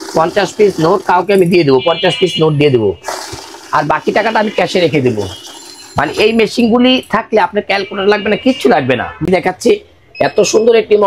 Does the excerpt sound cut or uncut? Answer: cut